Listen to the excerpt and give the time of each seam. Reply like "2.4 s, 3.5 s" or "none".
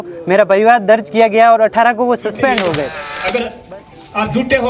2.9 s